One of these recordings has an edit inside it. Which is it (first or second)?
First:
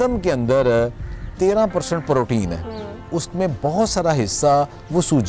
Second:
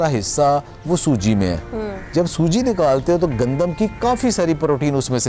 first